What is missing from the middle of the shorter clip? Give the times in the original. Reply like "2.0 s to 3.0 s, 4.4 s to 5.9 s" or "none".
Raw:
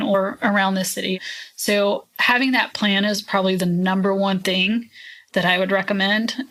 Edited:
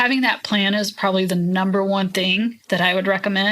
4.9 s to 5.2 s